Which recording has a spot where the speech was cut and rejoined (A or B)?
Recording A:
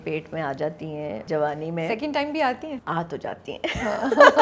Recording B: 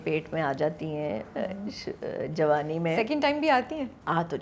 A